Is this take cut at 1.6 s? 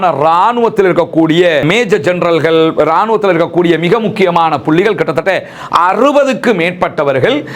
yes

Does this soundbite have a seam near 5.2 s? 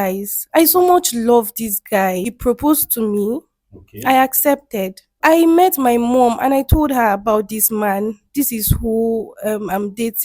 yes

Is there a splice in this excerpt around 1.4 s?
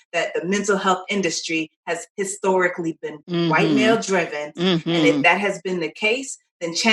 no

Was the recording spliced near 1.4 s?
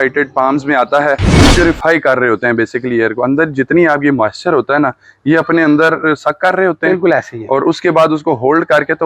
yes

